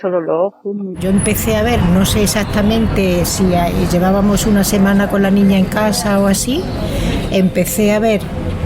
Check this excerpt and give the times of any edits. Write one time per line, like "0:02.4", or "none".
0:01.0